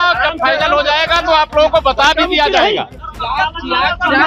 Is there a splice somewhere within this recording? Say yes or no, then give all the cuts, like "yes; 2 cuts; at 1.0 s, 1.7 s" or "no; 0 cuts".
no; 0 cuts